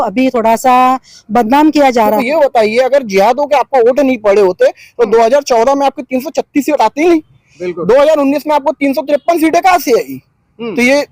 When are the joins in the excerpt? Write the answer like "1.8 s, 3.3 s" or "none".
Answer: 2.2 s